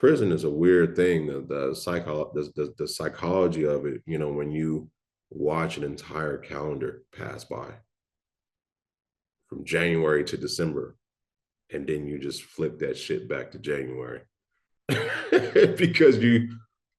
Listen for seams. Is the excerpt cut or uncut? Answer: uncut